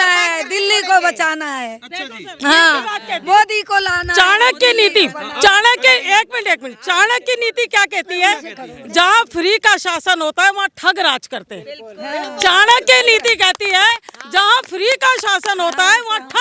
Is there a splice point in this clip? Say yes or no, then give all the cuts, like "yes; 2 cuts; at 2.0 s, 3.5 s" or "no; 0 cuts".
no; 0 cuts